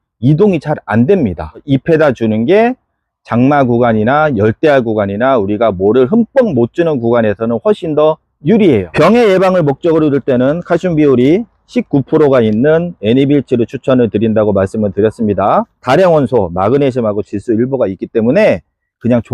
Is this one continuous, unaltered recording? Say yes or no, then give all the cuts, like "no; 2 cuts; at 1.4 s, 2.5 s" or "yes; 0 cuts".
no; 3 cuts; at 1.6 s, 8.9 s, 15.7 s